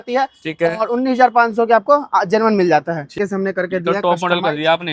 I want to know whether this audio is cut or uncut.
cut